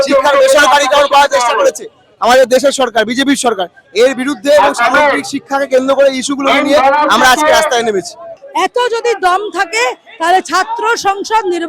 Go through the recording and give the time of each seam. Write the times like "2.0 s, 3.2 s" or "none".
8.3 s

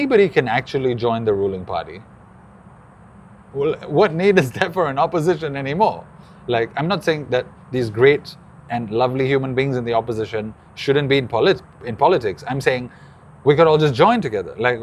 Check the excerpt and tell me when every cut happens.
none

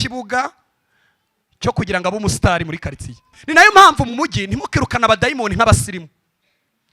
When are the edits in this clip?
3.4 s

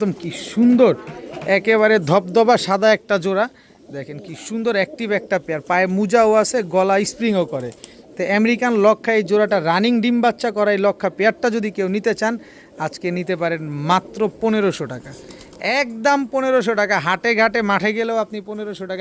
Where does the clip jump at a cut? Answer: none

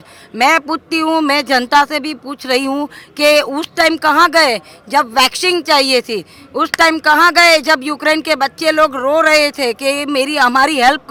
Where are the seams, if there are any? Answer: none

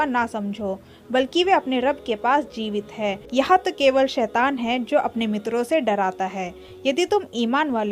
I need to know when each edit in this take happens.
3.2 s

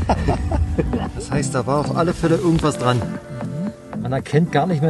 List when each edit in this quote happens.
1.1 s, 4.0 s

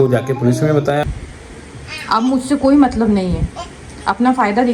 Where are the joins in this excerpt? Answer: 1.0 s

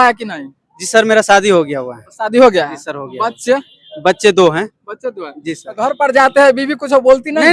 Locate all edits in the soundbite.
none

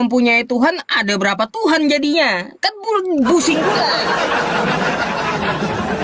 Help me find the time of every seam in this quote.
none

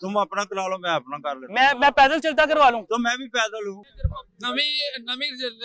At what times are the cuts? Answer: 3.8 s

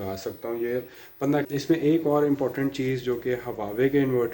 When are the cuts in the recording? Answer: 1.5 s

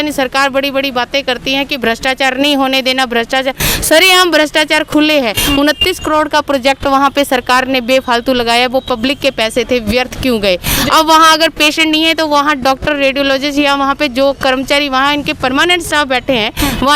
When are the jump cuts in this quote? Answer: 5.4 s

